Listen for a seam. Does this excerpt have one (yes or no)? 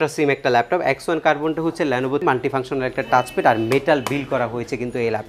yes